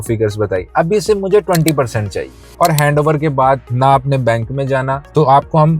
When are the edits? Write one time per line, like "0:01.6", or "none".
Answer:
0:02.5